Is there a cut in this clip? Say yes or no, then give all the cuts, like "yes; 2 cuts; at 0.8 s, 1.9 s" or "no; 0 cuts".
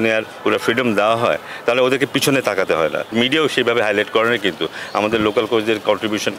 yes; 1 cut; at 3.1 s